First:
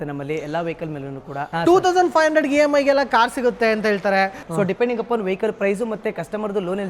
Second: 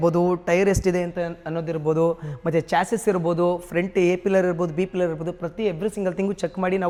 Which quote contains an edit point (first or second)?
first